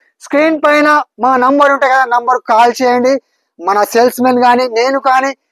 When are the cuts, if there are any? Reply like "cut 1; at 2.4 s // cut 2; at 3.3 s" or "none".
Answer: none